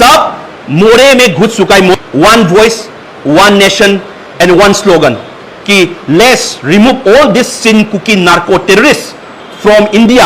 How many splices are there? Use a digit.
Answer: 1